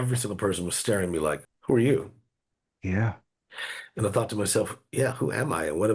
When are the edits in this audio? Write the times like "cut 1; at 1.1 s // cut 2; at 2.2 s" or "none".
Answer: cut 1; at 1.5 s